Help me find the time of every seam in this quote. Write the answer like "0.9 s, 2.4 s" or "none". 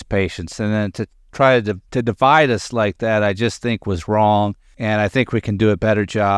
1.8 s, 4.7 s